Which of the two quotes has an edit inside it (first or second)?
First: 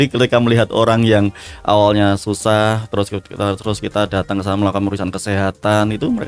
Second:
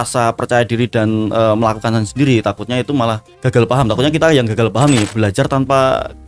second